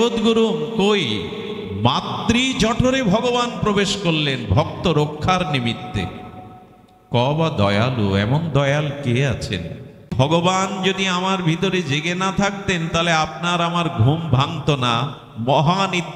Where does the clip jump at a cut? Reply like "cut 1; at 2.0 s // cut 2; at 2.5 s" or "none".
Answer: cut 1; at 10.1 s